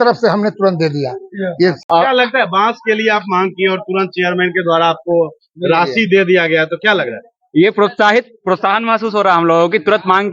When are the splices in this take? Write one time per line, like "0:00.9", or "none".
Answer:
0:01.8